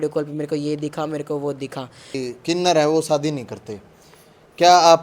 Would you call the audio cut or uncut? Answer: cut